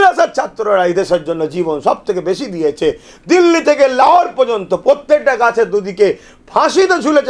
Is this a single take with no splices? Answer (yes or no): yes